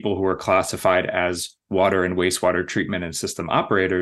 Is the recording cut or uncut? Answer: uncut